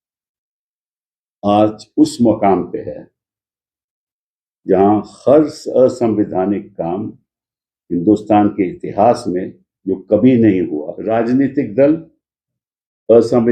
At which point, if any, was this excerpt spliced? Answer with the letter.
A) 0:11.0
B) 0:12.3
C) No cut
A